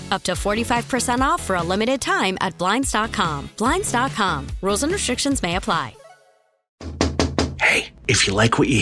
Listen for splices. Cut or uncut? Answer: cut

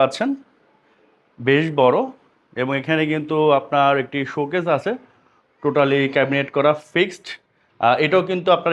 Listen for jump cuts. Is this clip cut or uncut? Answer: uncut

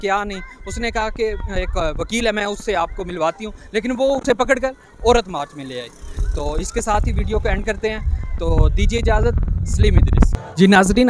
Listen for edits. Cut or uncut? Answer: uncut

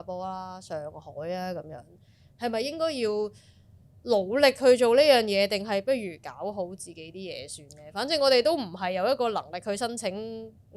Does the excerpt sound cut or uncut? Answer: uncut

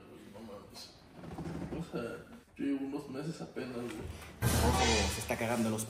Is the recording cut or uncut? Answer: uncut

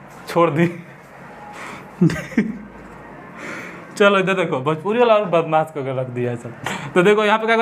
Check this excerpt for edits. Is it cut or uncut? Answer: uncut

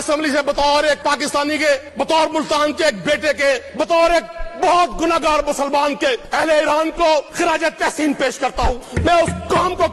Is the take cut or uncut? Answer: cut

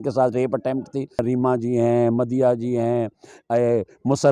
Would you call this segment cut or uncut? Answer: cut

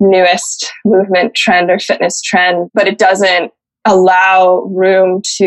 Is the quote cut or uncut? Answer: cut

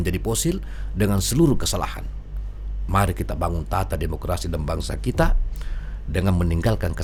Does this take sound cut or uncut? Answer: uncut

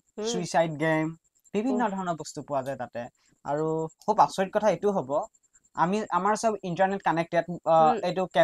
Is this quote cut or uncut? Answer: cut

